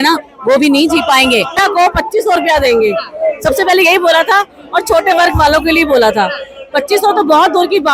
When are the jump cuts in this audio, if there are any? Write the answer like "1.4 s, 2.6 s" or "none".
1.6 s